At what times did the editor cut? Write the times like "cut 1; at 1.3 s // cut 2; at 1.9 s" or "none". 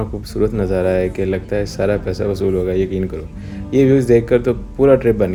none